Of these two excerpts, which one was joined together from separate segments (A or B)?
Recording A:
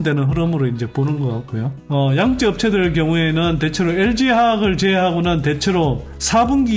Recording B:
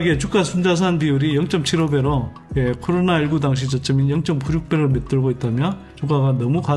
A